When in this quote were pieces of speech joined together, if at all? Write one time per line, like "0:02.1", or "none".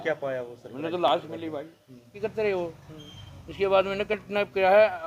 0:02.1